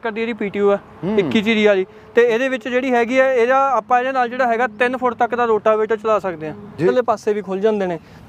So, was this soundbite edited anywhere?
yes; 1 cut; at 6.9 s

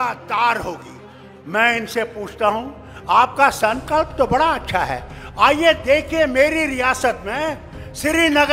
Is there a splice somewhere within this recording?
no; 0 cuts

